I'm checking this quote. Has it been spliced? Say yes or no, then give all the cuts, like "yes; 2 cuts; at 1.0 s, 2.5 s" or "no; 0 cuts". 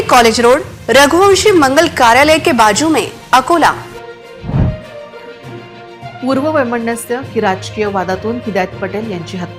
no; 0 cuts